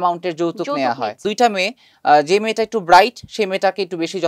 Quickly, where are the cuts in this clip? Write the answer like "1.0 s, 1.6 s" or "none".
1.3 s